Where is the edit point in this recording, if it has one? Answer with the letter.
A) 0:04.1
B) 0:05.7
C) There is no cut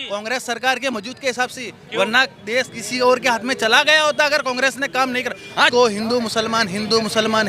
B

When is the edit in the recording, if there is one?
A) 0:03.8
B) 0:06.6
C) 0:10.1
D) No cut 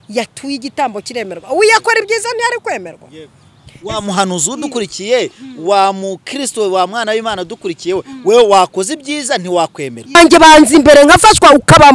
C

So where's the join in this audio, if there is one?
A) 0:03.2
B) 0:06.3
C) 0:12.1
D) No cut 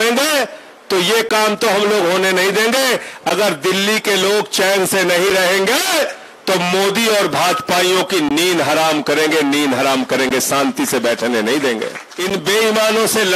C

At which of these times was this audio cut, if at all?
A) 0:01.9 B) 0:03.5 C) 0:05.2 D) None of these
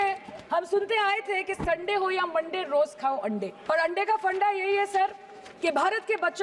B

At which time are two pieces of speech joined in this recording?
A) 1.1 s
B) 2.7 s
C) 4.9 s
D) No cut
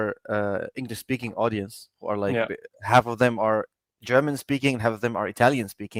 D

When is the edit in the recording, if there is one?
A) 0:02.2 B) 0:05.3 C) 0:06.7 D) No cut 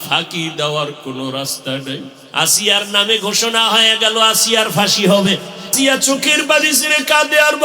A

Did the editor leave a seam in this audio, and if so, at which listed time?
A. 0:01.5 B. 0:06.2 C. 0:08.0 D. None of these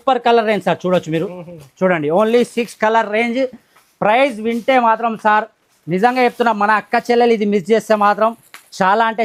D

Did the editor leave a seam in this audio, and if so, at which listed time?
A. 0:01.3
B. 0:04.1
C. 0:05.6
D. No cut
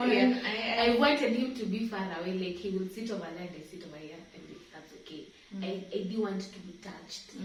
D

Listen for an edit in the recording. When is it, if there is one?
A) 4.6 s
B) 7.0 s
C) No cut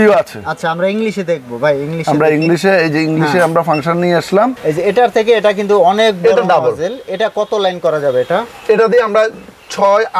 A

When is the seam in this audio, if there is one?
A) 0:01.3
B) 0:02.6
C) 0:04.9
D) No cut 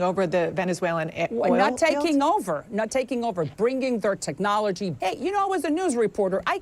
C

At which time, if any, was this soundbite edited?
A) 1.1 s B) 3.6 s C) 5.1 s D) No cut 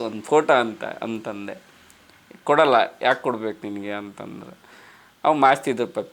D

